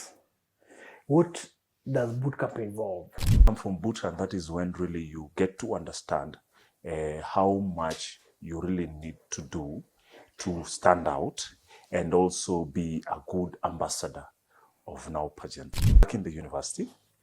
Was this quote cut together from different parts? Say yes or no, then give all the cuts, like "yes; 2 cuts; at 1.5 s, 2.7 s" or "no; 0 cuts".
yes; 2 cuts; at 3.4 s, 16.1 s